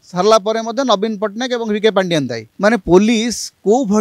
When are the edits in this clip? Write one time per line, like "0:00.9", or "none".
0:02.4

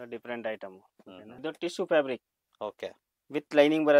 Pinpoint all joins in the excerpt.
0:01.3

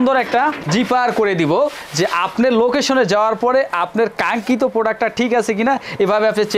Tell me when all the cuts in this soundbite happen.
none

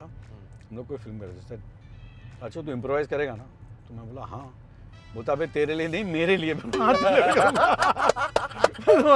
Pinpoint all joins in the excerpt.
none

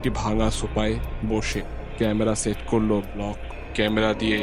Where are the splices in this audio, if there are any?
0:03.4

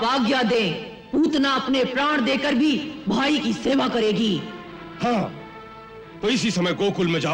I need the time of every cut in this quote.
none

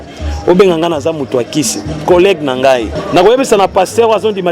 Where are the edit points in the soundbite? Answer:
0:03.0

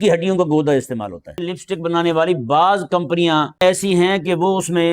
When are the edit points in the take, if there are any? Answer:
0:01.5
0:03.6

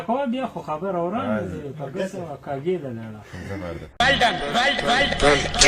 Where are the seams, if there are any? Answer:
0:03.8

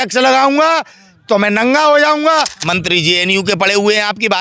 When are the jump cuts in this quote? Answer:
0:02.5

